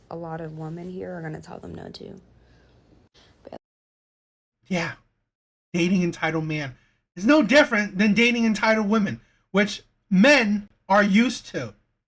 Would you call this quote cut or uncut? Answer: uncut